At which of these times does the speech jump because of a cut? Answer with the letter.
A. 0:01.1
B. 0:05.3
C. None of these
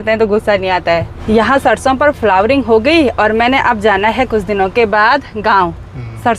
A